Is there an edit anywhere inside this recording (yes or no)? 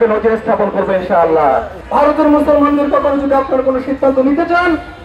yes